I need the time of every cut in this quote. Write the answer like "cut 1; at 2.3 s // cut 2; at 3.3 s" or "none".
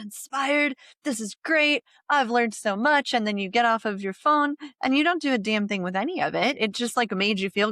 none